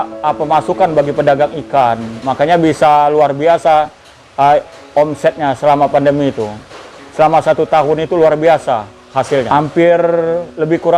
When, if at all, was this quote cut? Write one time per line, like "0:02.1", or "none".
0:09.5